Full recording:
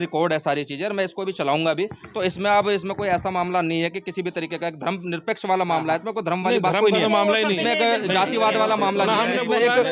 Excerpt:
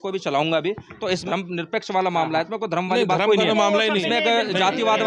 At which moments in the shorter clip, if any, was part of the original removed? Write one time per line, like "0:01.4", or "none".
0:01.2

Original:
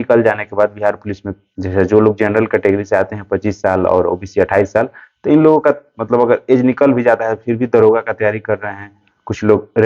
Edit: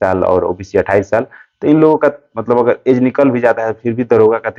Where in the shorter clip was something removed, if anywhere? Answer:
none

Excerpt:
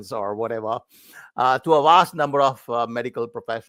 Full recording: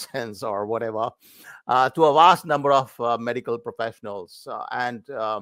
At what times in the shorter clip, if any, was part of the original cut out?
none

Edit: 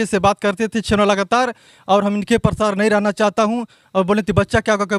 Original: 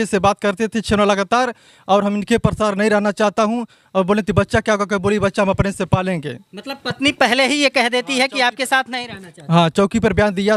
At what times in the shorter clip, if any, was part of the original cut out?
none

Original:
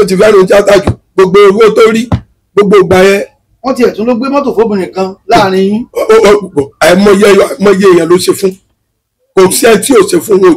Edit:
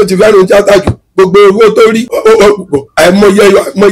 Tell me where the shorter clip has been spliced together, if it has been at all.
0:02.1

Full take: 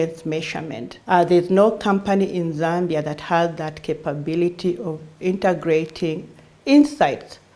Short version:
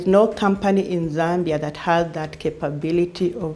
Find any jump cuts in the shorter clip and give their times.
none

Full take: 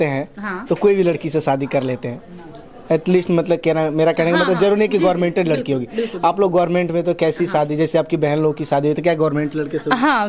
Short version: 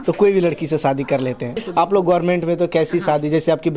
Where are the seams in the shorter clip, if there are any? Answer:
0:01.6

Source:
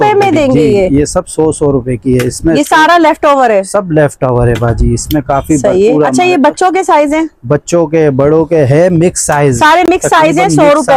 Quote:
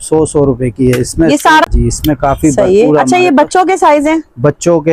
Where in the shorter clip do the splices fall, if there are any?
0:01.7

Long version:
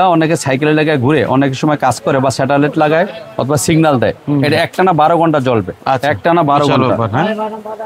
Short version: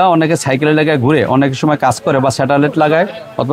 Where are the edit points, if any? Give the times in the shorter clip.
none

